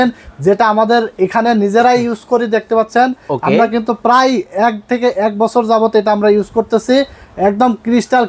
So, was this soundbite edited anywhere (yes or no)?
no